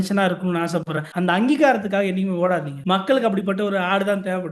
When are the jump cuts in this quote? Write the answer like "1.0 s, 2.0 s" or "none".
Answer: 1.0 s, 2.7 s